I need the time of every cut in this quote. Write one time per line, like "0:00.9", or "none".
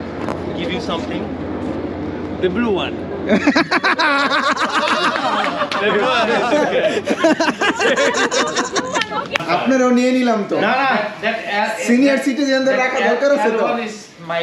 0:09.4